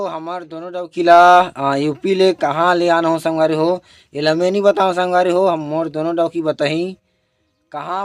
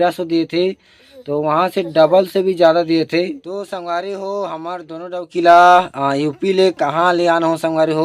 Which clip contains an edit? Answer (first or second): second